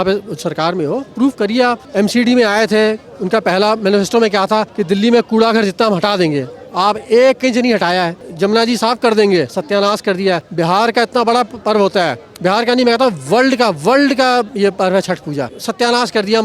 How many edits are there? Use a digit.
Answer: 6